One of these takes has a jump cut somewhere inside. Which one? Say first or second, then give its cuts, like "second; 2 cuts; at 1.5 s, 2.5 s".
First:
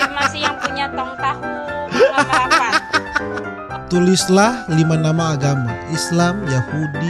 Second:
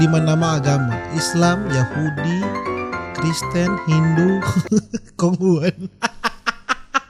first; 1 cut; at 3.6 s